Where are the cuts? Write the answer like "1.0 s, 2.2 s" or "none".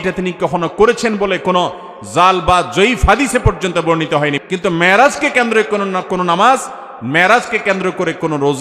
4.4 s